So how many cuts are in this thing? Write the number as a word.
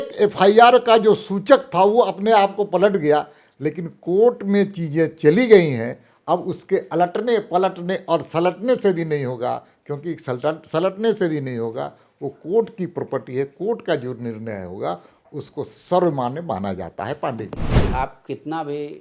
zero